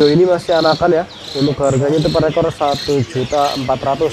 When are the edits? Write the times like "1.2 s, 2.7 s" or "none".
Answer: none